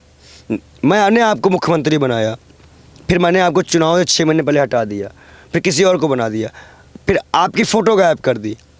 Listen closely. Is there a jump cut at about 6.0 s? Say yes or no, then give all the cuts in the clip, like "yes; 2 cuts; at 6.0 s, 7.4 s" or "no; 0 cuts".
no; 0 cuts